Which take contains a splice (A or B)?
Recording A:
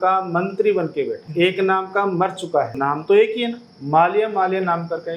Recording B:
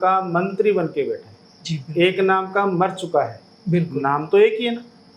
A